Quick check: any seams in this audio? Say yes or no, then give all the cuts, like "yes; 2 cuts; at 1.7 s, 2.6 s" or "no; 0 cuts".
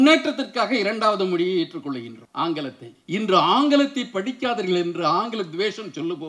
no; 0 cuts